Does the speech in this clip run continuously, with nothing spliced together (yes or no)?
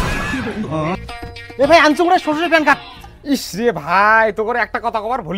no